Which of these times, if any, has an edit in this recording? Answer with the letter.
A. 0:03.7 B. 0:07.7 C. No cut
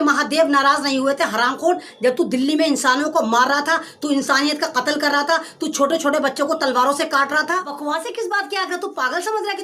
B